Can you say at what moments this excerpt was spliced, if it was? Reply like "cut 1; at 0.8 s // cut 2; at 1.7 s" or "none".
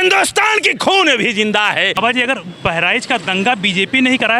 cut 1; at 2.0 s